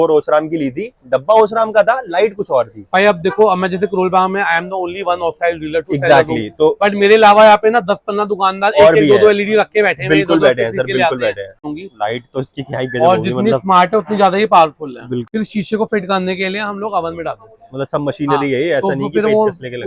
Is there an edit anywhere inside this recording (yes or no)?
yes